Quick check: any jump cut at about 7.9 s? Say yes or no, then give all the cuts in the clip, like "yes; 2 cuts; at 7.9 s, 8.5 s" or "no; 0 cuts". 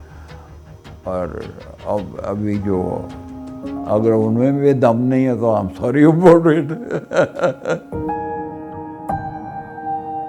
yes; 1 cut; at 7.9 s